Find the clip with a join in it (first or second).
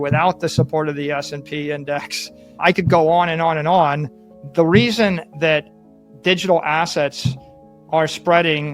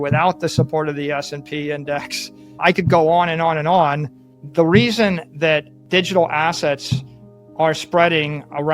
second